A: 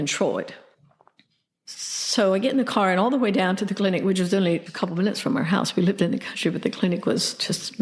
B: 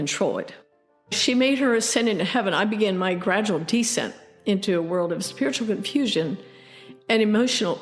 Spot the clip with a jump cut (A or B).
B